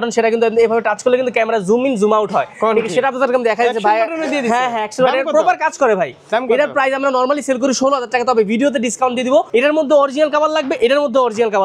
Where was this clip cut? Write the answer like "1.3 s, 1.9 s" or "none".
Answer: 9.5 s